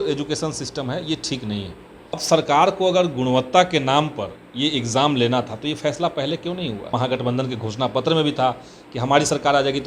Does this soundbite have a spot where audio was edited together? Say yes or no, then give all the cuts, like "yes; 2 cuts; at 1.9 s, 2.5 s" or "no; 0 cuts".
yes; 2 cuts; at 2.2 s, 6.9 s